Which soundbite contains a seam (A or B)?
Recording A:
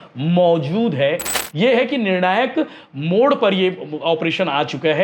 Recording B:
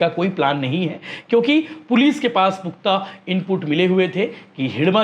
A